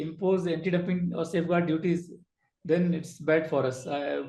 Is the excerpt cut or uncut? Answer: uncut